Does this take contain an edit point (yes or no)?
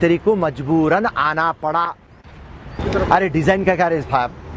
yes